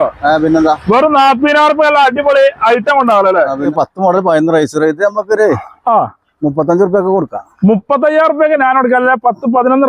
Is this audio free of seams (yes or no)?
no